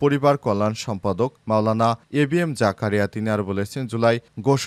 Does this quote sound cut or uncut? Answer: uncut